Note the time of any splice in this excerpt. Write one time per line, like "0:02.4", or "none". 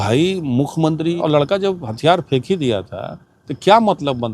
0:01.2